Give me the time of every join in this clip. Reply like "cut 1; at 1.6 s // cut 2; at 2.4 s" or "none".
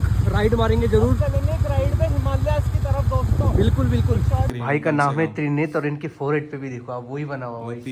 cut 1; at 4.5 s